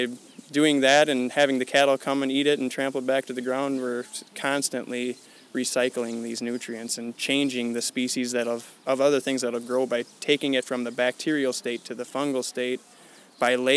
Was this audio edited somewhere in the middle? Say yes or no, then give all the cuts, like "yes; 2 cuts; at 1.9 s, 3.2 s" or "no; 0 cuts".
no; 0 cuts